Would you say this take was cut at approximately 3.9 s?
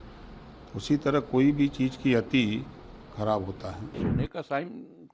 yes; 1 cut; at 3.9 s

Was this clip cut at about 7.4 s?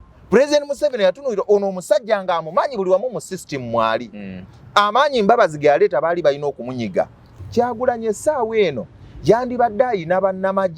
yes; 1 cut; at 7.4 s

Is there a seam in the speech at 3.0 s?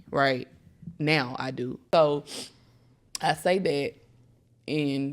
no; 1 cut; at 1.8 s

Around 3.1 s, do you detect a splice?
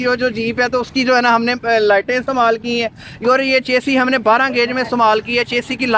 no; 0 cuts

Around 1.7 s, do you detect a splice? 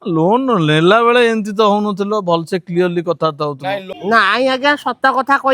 no; 1 cut; at 3.8 s

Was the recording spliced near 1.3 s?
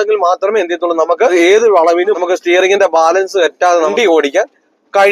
yes; 3 cuts; at 1.3 s, 2.2 s, 3.9 s

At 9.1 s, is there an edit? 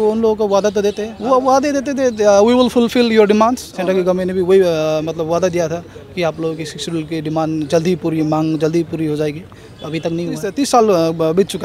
no; 3 cuts; at 1.1 s, 3.7 s, 10.5 s

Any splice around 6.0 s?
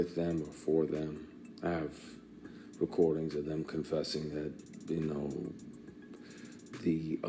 no; 1 cut; at 1.4 s

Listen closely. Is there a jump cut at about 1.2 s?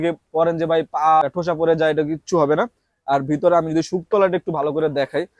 yes; 1 cut; at 1.2 s

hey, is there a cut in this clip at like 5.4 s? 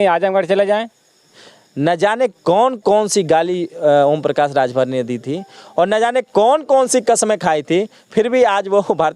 no; 1 cut; at 1.3 s

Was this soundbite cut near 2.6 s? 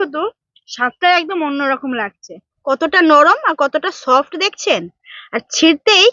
yes; 1 cut; at 2.6 s

